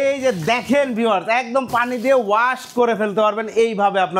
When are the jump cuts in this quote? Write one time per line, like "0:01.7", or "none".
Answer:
none